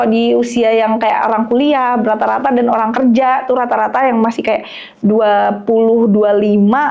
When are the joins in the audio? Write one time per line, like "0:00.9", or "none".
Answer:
none